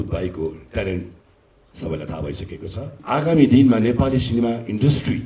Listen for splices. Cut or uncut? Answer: cut